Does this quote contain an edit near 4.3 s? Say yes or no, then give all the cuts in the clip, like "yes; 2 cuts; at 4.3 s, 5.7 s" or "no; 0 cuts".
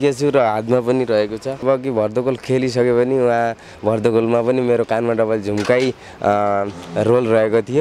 no; 1 cut; at 1.6 s